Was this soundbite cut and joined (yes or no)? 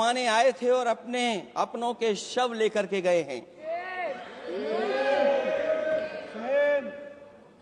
no